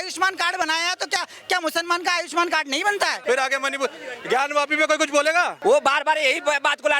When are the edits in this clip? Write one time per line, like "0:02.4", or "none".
0:03.2
0:05.5